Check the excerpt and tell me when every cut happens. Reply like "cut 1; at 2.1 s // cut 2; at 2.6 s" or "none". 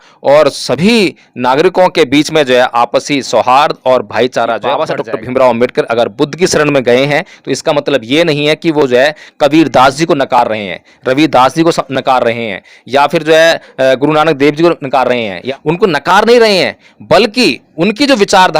cut 1; at 4.8 s // cut 2; at 15.4 s